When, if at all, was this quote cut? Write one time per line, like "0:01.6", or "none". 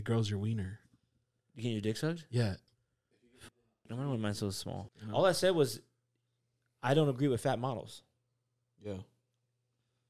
0:04.9